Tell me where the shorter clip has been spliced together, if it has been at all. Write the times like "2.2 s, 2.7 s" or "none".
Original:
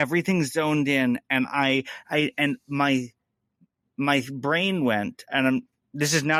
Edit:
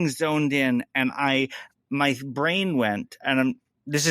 1.6 s